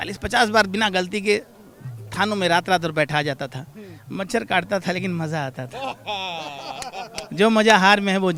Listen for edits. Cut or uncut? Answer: uncut